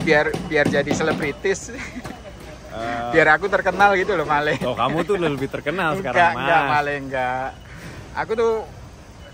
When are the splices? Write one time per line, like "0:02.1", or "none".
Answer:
none